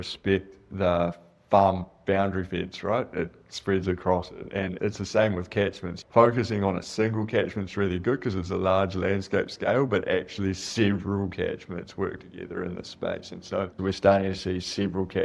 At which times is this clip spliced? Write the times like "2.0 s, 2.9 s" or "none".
5.9 s, 13.7 s